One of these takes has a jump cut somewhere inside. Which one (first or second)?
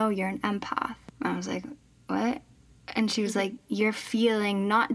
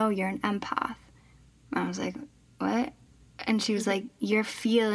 first